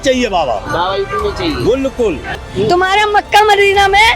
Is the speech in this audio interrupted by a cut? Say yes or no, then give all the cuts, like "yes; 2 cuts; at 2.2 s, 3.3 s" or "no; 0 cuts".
yes; 1 cut; at 2.4 s